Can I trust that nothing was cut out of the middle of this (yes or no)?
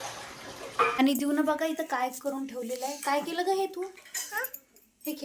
no